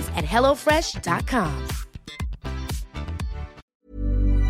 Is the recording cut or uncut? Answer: cut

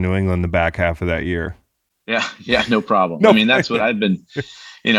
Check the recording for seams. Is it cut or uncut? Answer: uncut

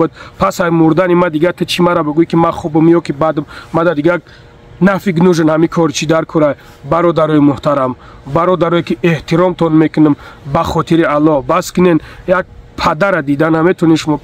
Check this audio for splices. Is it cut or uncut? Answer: uncut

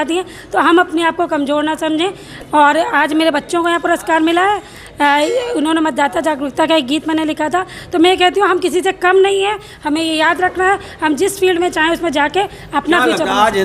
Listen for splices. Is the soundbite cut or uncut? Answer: uncut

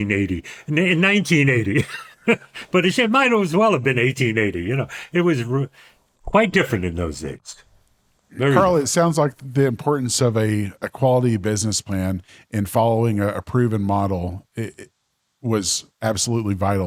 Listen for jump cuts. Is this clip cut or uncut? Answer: uncut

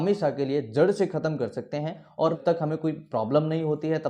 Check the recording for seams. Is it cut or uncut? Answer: cut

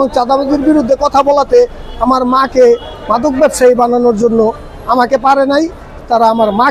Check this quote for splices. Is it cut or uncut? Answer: uncut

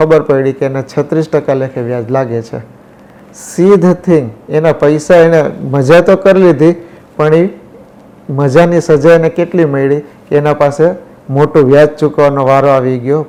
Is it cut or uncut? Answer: uncut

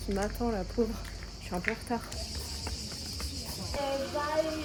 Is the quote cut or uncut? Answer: uncut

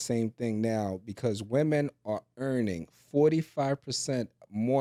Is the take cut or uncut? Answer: uncut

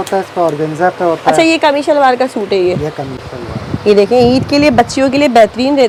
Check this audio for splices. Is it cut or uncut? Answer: uncut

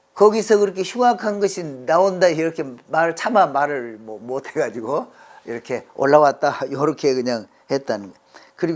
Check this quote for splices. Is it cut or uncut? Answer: uncut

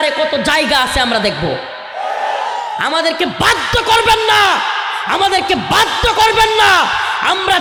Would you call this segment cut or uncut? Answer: uncut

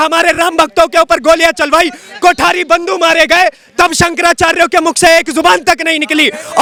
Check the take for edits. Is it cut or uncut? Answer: uncut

